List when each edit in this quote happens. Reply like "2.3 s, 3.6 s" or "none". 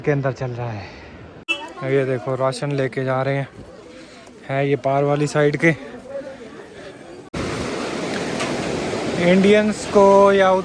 1.5 s, 7.3 s